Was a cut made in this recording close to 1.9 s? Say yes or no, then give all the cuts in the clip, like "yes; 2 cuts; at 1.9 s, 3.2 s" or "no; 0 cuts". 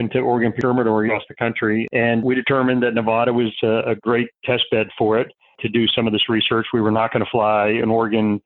yes; 1 cut; at 1.9 s